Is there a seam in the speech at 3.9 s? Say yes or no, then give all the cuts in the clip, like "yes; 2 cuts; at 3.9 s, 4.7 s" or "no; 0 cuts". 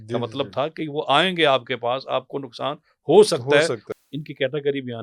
yes; 1 cut; at 3.9 s